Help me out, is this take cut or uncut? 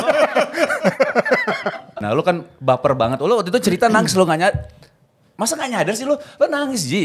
cut